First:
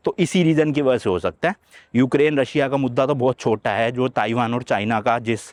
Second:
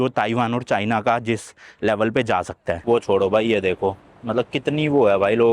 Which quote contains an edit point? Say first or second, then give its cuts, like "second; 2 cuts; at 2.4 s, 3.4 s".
second; 1 cut; at 2.8 s